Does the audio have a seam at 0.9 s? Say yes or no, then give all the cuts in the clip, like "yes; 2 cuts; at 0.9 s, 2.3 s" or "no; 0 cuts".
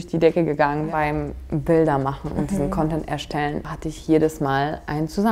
yes; 2 cuts; at 0.9 s, 3.7 s